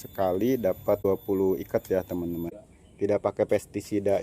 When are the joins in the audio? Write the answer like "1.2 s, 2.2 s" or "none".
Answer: 1.1 s, 3.0 s